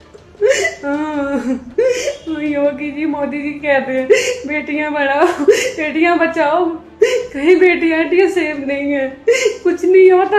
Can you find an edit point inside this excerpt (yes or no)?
no